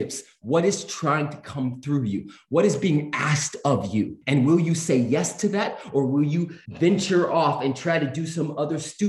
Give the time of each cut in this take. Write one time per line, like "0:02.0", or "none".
0:04.2
0:06.6